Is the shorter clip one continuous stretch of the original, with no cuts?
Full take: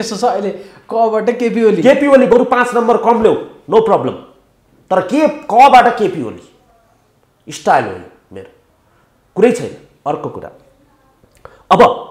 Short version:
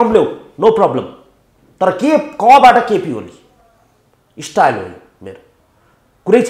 yes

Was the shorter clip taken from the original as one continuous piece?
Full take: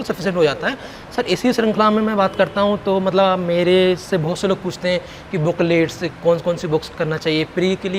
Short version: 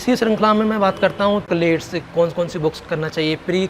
no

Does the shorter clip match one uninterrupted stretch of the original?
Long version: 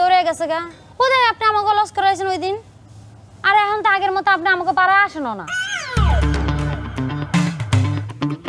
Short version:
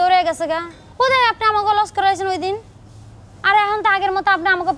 yes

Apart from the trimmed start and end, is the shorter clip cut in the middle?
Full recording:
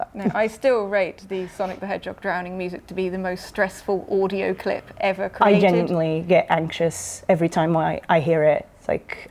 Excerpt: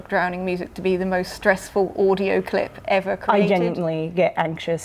no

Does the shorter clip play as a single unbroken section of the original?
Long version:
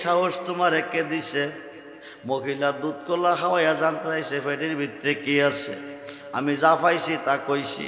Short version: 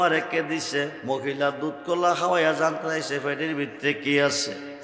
no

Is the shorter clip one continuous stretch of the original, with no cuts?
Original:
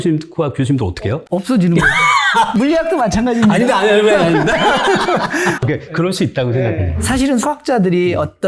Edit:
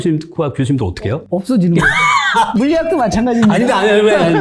yes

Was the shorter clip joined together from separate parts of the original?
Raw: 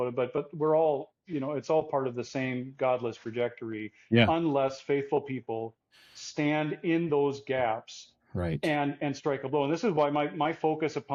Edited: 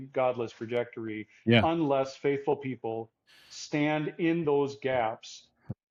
no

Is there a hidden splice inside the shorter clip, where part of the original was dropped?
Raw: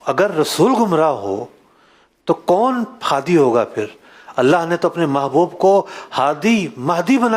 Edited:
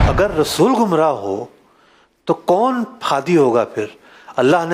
no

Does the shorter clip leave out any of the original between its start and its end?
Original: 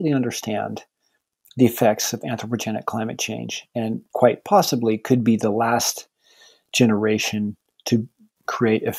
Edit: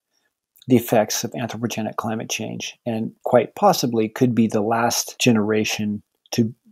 yes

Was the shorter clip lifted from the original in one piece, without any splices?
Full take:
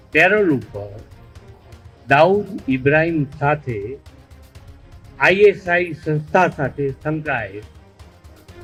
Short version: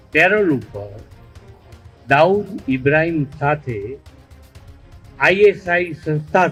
yes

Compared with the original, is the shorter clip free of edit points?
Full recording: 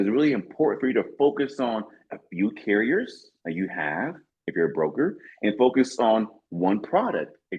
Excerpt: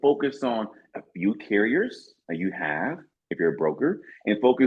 yes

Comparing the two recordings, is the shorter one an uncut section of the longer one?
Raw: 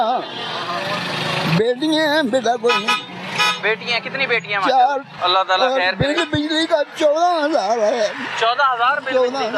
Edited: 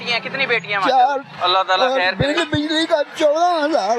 yes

